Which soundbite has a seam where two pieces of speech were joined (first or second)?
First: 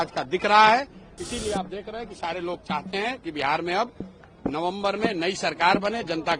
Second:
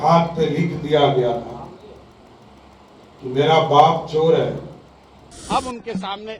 second